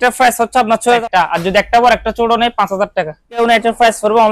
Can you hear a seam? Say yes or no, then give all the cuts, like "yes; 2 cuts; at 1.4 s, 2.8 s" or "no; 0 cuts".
yes; 2 cuts; at 1.0 s, 3.4 s